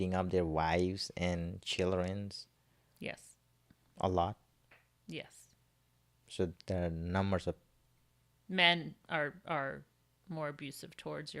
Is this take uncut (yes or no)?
yes